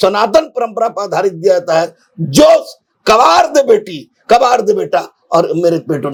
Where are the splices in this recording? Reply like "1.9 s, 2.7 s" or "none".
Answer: none